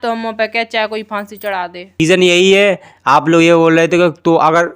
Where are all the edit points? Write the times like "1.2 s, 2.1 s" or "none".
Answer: 2.0 s